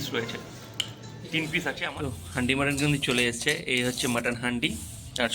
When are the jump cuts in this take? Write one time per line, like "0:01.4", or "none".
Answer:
0:01.8